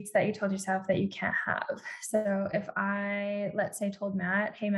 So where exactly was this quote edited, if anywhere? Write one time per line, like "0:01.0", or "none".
none